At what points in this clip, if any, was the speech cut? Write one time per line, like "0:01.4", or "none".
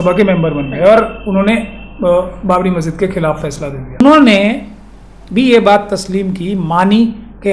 0:04.0